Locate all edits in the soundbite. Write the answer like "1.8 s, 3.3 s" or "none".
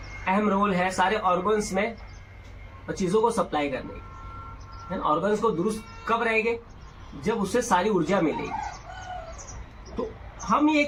none